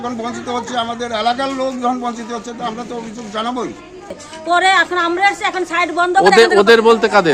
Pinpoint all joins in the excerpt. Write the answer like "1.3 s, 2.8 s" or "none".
4.2 s